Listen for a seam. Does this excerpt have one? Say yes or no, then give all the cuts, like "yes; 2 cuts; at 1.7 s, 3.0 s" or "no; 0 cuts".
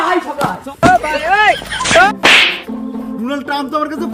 yes; 1 cut; at 2.1 s